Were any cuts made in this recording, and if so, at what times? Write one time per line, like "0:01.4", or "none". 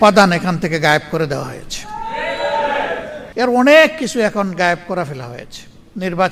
0:03.2